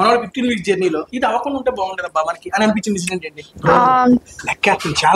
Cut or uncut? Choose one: cut